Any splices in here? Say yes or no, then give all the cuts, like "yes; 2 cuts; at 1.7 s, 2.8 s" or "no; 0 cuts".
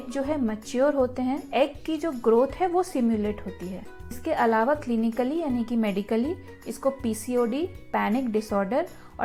no; 0 cuts